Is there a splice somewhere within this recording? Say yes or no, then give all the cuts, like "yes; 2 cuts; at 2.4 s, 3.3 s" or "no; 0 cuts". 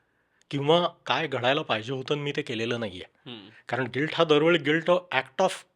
no; 0 cuts